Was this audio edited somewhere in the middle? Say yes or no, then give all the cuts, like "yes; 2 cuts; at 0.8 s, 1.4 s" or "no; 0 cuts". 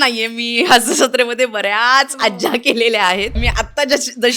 yes; 1 cut; at 3.4 s